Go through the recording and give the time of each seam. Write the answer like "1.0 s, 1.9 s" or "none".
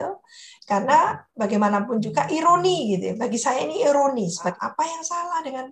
4.5 s

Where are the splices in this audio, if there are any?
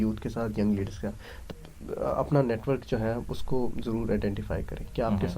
1.3 s

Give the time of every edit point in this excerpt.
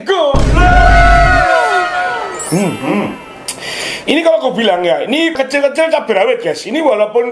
2.0 s

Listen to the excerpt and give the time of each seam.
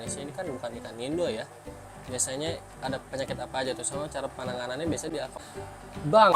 5.4 s

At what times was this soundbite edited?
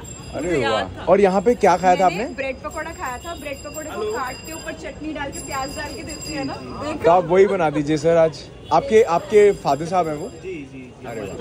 none

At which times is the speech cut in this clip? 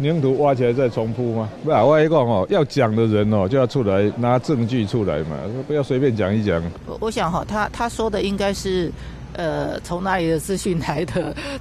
1.5 s, 6.8 s

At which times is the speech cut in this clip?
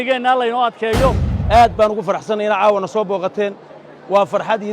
1.3 s

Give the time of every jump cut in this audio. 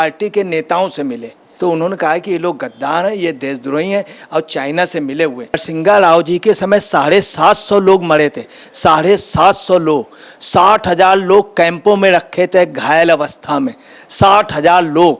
1.5 s, 5.6 s

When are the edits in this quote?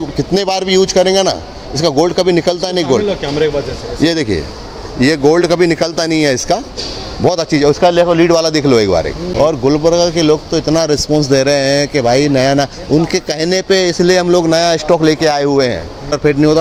none

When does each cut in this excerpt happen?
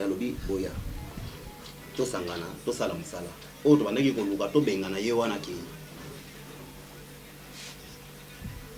none

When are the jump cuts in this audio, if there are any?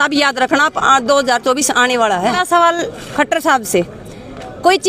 2.4 s

